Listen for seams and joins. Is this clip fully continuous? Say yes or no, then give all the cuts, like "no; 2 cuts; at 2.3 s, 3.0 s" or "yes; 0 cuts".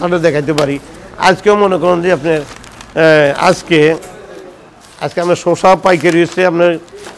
yes; 0 cuts